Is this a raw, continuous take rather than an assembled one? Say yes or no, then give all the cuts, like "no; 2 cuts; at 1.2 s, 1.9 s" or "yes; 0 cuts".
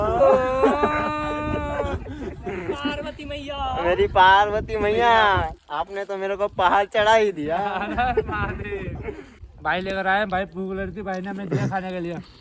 yes; 0 cuts